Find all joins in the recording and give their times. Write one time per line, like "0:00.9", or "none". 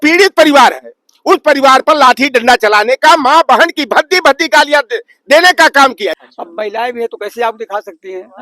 0:06.1